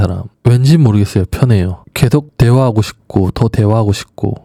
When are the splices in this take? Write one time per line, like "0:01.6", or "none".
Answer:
none